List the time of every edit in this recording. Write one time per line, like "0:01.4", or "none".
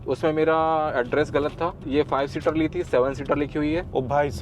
0:01.8